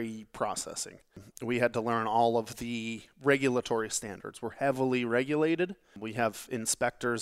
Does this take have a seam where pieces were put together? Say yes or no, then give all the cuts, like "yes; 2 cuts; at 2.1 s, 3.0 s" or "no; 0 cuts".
yes; 2 cuts; at 1.3 s, 5.9 s